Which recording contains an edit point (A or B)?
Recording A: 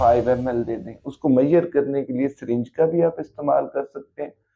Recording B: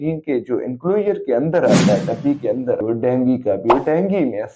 B